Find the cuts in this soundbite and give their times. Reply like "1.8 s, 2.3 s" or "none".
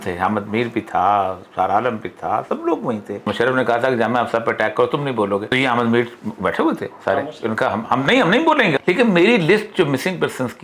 3.3 s, 5.5 s, 8.8 s